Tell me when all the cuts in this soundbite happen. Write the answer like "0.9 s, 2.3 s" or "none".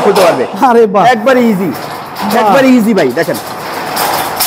none